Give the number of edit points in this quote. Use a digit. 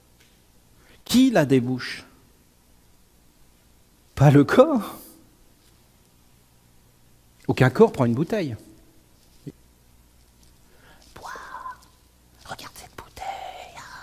1